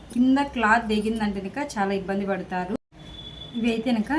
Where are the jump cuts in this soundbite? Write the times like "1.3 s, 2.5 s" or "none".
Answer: 2.8 s